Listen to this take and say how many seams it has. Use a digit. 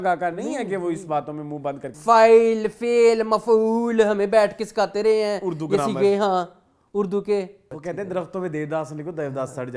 2